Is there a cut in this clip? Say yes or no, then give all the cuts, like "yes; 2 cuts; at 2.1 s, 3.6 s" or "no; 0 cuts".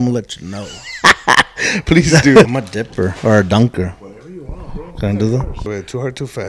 yes; 2 cuts; at 2.5 s, 5.7 s